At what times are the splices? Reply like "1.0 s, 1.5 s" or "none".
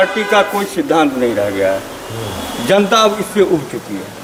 none